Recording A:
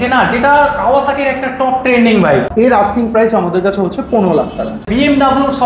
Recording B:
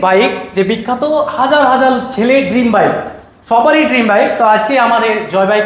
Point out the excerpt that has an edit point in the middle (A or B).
A